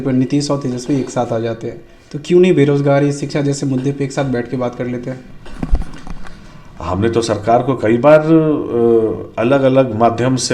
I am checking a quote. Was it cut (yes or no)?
no